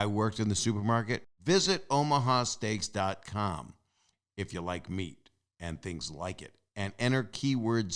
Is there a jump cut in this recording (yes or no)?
yes